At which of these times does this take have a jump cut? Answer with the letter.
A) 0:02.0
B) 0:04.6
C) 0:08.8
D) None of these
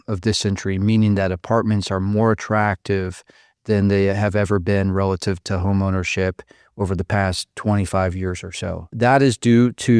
C